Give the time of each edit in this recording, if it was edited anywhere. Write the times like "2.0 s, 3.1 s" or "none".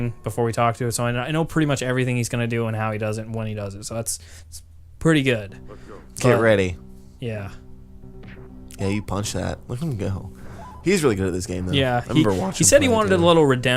none